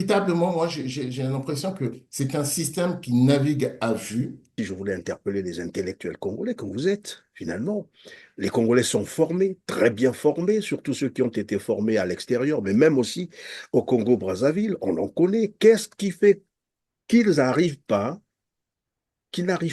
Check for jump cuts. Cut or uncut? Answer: cut